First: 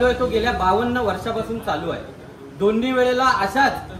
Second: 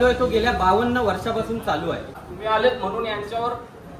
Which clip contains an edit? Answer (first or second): second